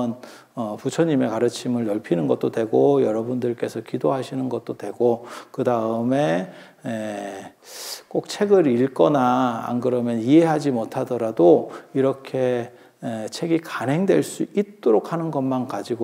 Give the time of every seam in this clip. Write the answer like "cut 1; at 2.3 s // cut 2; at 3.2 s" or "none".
none